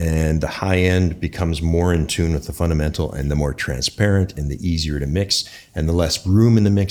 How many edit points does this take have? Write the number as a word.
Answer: zero